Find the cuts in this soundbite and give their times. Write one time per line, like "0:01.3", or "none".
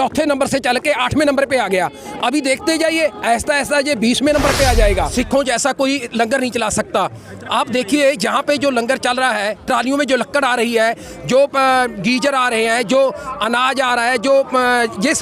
0:05.1